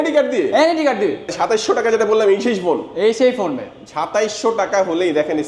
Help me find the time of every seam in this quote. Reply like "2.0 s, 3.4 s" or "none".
1.3 s